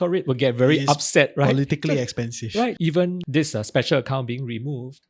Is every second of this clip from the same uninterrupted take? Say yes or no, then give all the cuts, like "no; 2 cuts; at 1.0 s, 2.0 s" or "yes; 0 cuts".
no; 1 cut; at 2.8 s